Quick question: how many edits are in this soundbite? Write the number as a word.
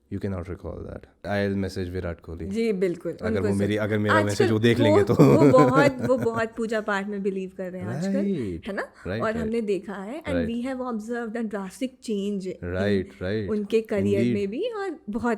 one